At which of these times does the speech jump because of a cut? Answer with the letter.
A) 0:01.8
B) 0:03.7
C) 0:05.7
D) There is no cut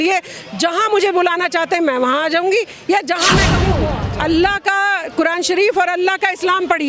B